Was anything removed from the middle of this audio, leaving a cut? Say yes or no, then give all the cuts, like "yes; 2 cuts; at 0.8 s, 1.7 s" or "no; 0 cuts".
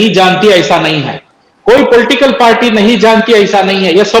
no; 0 cuts